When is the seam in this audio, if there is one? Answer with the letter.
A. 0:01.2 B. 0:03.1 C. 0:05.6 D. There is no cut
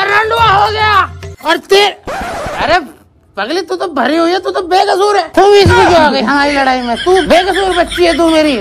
A